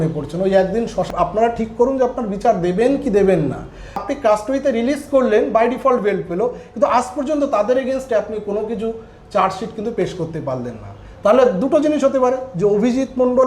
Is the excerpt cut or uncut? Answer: cut